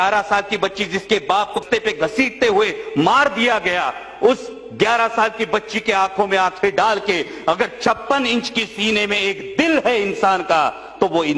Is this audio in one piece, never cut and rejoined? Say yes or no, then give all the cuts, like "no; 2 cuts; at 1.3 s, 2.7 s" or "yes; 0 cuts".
no; 1 cut; at 1.6 s